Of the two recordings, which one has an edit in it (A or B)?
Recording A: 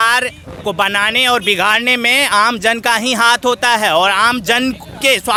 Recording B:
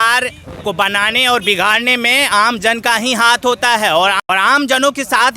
B